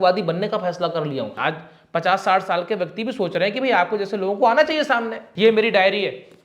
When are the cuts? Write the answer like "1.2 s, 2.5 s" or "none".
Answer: 1.4 s, 5.2 s